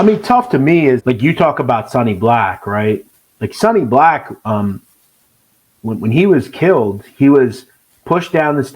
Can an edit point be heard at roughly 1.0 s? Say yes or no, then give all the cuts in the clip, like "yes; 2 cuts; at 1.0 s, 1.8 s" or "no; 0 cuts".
yes; 1 cut; at 1.0 s